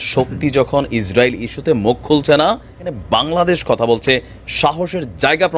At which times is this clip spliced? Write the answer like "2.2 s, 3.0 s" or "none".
2.9 s